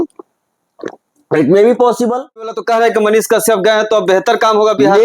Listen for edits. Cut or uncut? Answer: cut